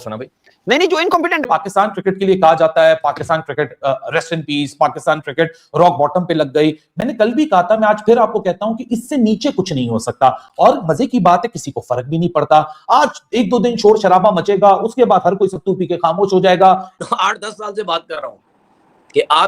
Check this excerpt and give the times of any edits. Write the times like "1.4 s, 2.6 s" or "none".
1.5 s, 17.0 s